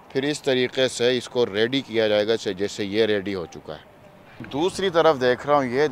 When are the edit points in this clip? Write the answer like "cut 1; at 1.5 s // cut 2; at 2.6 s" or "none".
cut 1; at 4.5 s